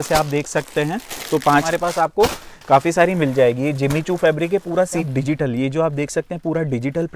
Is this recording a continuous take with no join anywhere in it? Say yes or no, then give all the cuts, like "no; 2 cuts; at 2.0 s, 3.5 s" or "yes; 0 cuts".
no; 2 cuts; at 1.7 s, 5.0 s